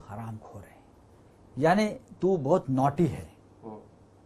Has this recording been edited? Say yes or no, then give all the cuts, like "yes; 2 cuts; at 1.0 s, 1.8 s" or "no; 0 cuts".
no; 0 cuts